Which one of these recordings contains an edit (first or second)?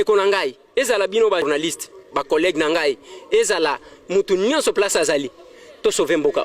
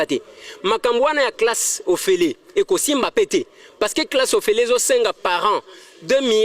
first